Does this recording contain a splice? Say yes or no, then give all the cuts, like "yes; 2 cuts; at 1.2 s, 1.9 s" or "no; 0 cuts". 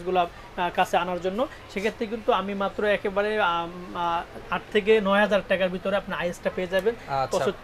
no; 0 cuts